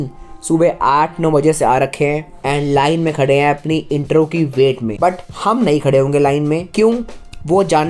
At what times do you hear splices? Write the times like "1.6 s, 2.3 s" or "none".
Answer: 2.3 s, 4.9 s, 6.7 s